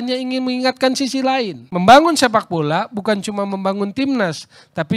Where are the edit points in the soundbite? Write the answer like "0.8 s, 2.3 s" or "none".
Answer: 1.6 s

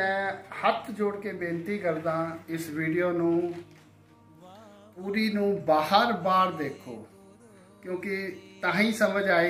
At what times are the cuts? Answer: none

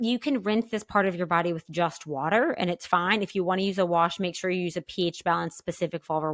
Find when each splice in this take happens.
none

